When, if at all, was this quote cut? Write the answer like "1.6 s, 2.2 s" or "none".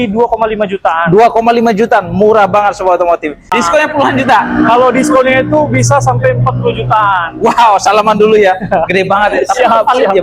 3.5 s